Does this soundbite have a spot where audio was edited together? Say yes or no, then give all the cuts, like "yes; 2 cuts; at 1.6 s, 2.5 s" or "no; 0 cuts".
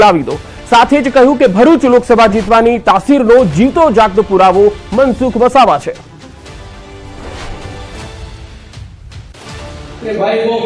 no; 0 cuts